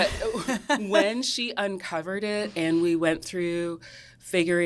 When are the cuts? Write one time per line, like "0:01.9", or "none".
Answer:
none

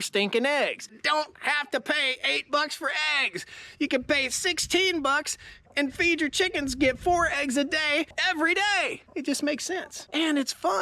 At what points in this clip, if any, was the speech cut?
0:01.0
0:08.1
0:09.0
0:10.0

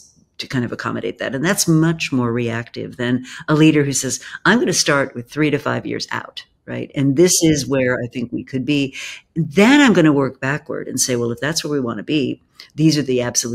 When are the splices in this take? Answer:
none

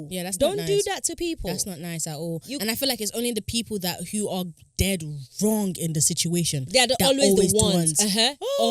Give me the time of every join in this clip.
none

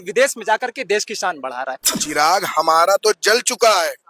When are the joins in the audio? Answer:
0:01.8

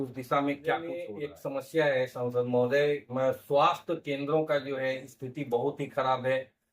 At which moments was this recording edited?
0:01.2

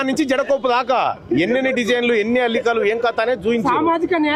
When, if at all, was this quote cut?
none

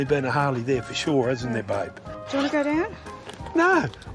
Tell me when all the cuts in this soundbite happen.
0:02.1

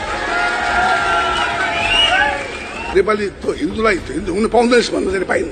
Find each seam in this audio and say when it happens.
0:02.9

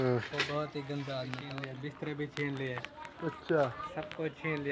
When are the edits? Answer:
0:01.5

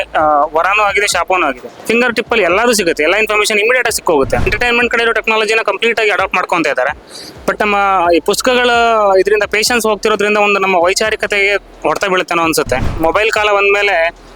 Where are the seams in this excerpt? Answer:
0:01.7
0:04.5
0:12.9

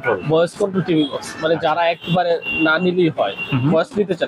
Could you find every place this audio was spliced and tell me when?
none

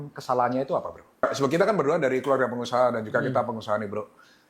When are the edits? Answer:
0:01.2

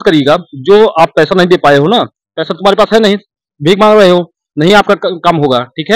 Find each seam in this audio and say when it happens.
none

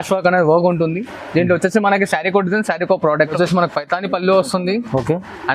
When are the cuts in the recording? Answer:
0:03.3

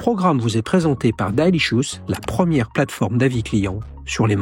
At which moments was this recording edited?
none

